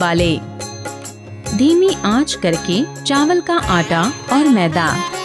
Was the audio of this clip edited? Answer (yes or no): no